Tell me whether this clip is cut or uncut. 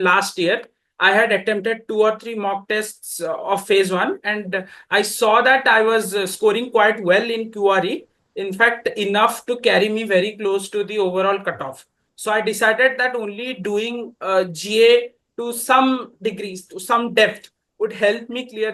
uncut